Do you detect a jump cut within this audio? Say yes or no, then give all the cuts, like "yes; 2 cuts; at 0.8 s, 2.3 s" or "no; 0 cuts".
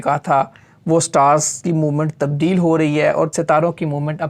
yes; 1 cut; at 3.3 s